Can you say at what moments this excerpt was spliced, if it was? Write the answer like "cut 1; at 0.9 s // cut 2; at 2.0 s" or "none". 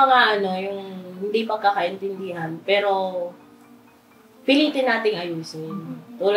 none